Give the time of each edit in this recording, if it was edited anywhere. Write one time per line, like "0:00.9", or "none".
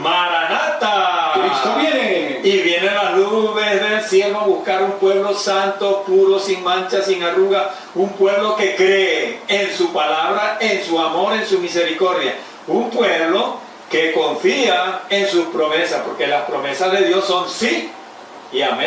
none